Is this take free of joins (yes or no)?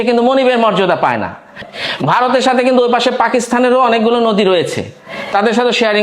no